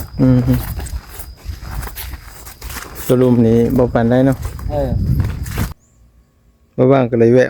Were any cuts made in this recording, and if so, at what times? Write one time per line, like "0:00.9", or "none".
0:05.7